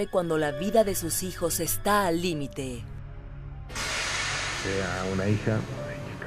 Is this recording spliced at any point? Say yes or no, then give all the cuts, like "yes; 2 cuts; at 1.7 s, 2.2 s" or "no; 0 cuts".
yes; 1 cut; at 4.9 s